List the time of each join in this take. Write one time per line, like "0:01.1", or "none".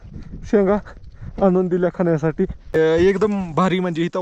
0:02.7